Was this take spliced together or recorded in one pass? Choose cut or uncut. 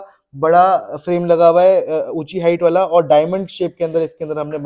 uncut